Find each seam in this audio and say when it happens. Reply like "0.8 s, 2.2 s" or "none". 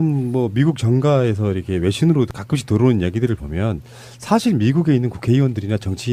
5.1 s